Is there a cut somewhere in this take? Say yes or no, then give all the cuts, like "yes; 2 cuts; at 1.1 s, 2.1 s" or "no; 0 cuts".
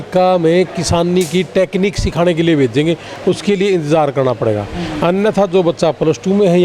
no; 0 cuts